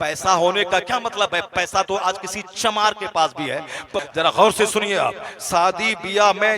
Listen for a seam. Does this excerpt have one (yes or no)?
yes